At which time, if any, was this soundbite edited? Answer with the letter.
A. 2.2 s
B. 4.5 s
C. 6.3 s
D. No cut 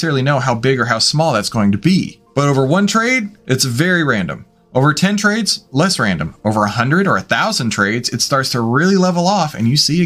A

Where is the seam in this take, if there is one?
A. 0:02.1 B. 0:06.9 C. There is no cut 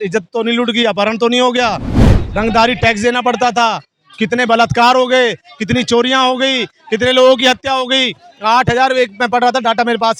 C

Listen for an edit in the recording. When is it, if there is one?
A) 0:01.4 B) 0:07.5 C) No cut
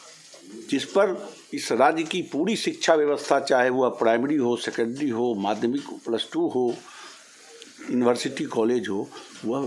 C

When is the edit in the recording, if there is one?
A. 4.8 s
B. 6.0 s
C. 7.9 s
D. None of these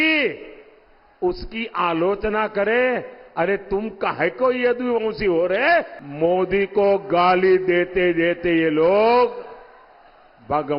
B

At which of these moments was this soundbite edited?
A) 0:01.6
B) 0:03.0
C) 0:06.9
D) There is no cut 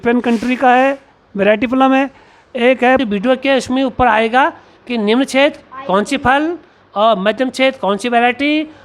B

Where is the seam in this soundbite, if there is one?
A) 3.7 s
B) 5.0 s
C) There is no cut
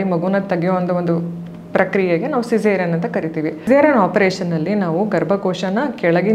A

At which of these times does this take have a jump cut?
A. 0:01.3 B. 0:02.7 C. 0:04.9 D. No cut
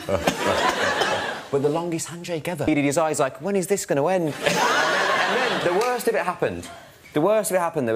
B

